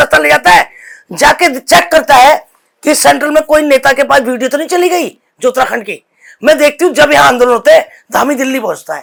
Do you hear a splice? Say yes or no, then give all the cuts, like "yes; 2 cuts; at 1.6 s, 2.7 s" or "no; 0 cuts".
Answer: no; 0 cuts